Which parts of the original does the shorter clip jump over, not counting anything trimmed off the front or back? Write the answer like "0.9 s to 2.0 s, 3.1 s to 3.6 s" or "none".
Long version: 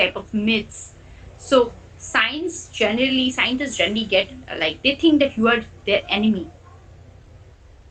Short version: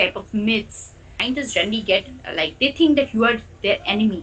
1.2 s to 3.4 s